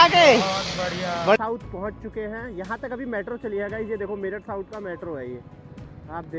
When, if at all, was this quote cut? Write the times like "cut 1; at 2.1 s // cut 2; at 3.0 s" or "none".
cut 1; at 1.4 s

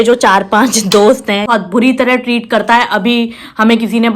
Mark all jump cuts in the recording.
cut 1; at 1.5 s

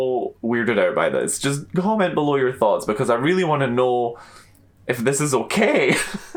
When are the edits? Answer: none

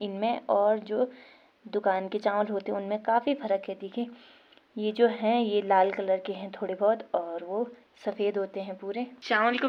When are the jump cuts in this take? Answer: none

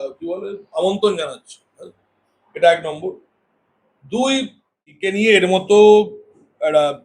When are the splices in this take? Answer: cut 1; at 5.1 s

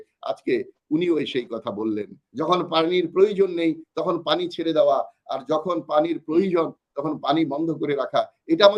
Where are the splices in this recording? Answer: cut 1; at 2.2 s

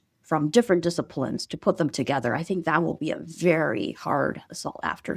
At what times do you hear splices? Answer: none

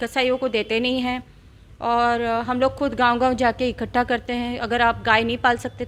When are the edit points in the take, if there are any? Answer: none

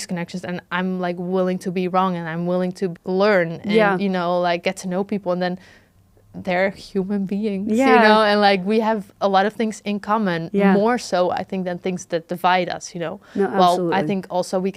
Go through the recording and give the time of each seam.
none

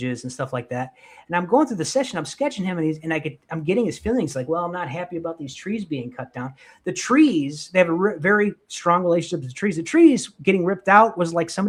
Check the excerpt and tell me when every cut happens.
none

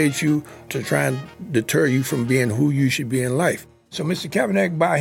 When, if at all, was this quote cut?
cut 1; at 3.8 s

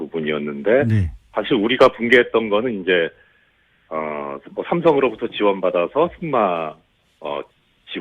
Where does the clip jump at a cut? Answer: cut 1; at 2.9 s

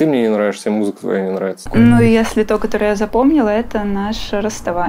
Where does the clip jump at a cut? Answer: cut 1; at 1.6 s

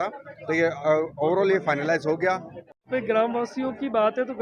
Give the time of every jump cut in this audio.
cut 1; at 2.9 s

